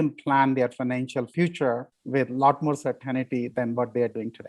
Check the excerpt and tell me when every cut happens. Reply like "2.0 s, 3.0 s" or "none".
1.3 s, 1.9 s, 3.5 s

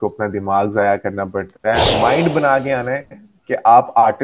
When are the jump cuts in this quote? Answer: 1.8 s

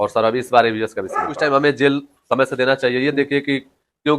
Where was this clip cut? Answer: 1.3 s

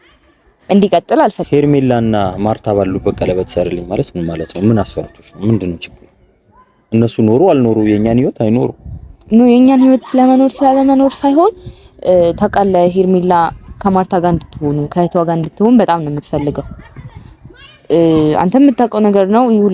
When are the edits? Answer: 1.4 s

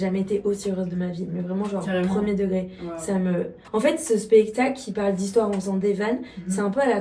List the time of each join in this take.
none

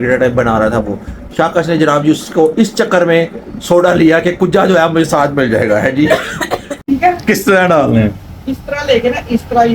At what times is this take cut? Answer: 6.9 s

